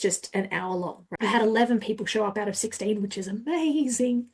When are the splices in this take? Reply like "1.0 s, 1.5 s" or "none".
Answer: 1.0 s